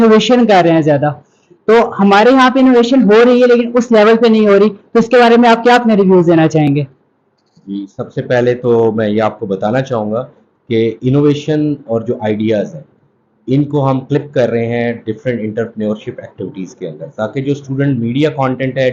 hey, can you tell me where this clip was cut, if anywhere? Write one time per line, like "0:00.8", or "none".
none